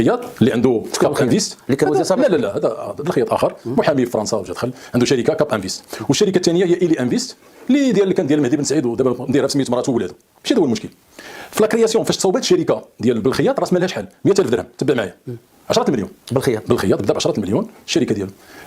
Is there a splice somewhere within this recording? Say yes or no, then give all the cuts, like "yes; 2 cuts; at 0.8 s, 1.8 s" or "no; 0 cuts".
no; 0 cuts